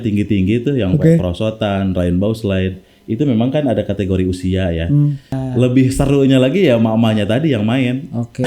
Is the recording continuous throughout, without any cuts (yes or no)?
no